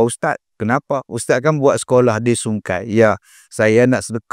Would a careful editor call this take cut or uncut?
uncut